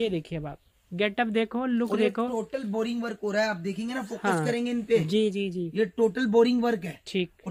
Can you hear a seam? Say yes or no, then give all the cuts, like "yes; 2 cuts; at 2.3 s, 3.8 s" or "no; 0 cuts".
no; 0 cuts